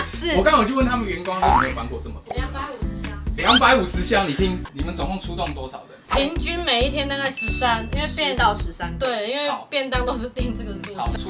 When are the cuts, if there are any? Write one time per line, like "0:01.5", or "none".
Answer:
none